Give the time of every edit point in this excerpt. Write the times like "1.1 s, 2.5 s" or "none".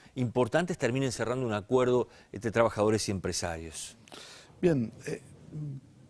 3.0 s